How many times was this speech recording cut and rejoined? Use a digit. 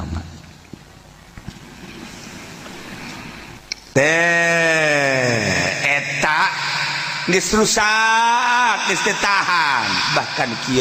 1